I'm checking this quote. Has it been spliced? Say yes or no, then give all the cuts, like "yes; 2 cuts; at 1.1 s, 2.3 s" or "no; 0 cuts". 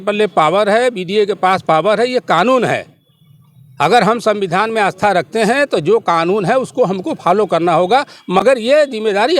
no; 0 cuts